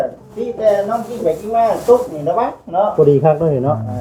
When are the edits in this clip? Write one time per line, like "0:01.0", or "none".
none